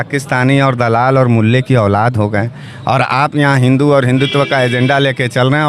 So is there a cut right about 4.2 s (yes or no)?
no